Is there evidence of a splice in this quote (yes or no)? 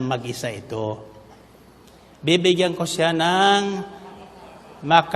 no